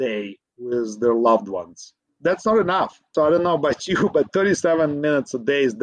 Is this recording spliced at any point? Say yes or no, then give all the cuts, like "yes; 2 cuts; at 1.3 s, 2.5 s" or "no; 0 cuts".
yes; 1 cut; at 2.1 s